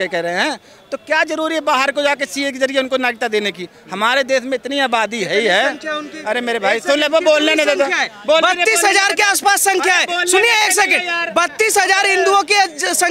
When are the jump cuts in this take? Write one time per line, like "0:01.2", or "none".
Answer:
none

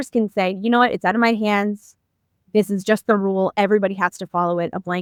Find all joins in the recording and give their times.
none

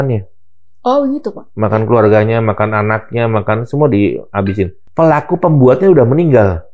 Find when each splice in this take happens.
0:04.8

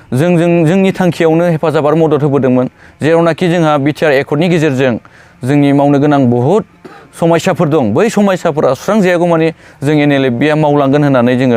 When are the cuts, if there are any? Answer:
none

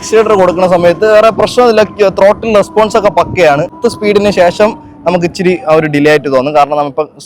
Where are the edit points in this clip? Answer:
0:03.8

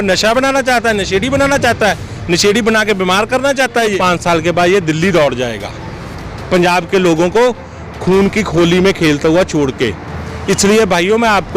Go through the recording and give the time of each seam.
0:03.9

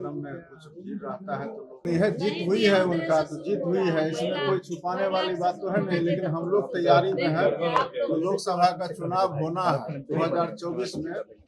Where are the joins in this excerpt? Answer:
0:01.8

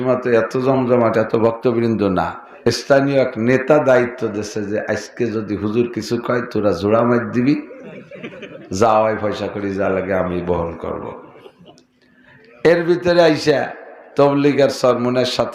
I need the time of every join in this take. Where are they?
0:02.4

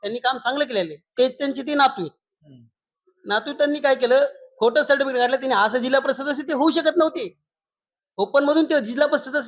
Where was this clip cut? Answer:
0:01.1

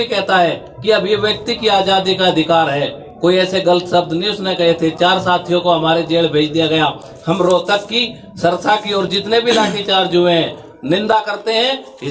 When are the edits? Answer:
none

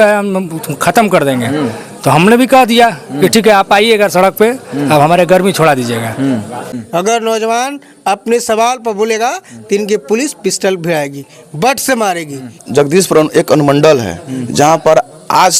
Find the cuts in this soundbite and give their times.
0:06.6
0:12.6

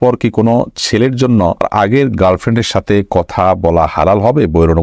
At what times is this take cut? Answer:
0:01.7

